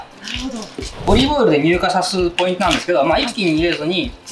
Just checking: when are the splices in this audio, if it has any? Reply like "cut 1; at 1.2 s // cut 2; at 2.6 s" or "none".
cut 1; at 1.1 s